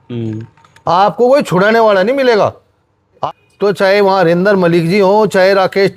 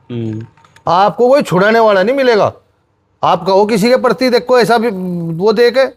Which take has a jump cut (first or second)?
first